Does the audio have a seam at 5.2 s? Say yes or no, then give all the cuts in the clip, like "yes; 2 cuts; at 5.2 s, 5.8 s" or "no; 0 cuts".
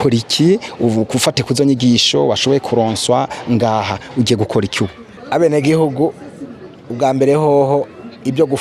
yes; 1 cut; at 5.2 s